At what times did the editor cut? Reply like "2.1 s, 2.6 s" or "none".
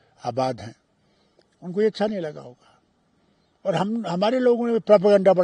none